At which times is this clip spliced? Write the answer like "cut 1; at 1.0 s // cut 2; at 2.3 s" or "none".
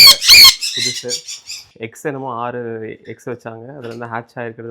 cut 1; at 1.6 s